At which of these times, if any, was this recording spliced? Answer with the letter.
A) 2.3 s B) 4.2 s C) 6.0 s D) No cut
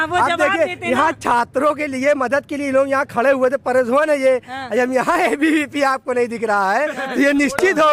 D